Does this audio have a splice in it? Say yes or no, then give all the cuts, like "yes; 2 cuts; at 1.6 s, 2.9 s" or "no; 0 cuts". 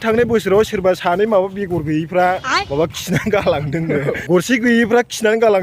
yes; 1 cut; at 4.2 s